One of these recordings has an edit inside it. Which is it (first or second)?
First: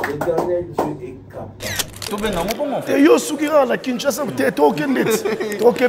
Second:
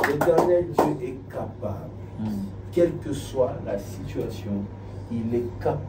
first